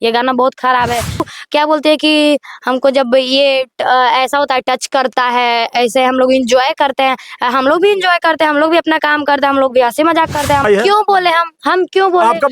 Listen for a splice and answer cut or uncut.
cut